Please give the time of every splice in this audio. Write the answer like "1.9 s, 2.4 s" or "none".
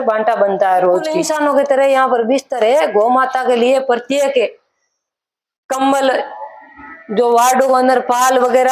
1.2 s